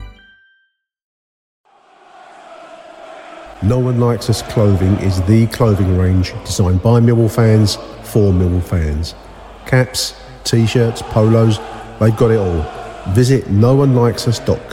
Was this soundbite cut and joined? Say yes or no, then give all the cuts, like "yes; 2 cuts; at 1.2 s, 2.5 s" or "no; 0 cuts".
yes; 1 cut; at 1.2 s